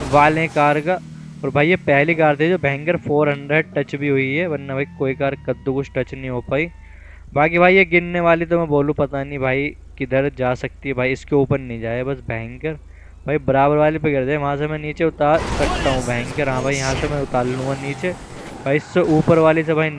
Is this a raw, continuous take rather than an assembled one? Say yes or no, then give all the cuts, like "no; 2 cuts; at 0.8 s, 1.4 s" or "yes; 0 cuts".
yes; 0 cuts